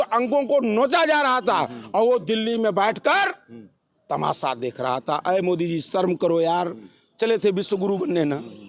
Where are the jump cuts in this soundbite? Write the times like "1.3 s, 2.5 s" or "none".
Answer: none